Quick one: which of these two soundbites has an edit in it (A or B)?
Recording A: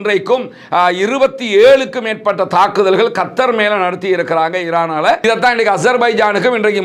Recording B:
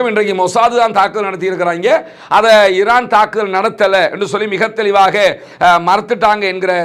A